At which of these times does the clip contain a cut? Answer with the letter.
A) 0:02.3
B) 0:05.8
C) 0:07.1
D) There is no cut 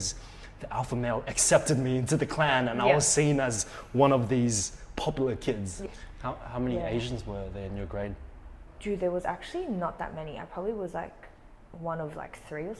B